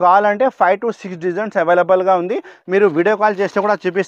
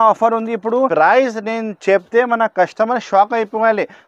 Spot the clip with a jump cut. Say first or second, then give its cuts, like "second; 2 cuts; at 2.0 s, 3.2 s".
second; 1 cut; at 0.9 s